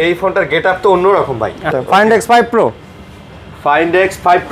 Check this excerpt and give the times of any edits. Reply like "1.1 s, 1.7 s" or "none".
1.7 s